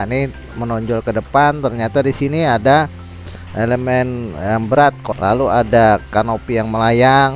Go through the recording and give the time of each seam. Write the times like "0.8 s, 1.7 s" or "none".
5.1 s